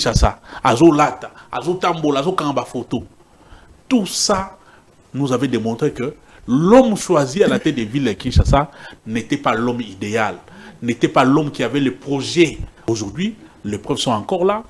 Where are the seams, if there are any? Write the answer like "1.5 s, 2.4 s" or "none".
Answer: 12.9 s